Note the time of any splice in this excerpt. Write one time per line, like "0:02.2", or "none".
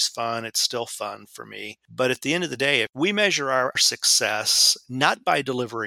0:01.8
0:03.8